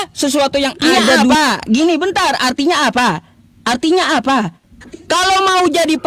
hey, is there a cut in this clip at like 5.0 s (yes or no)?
no